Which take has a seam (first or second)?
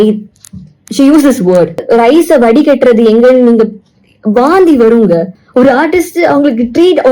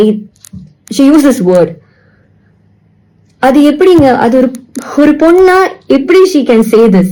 first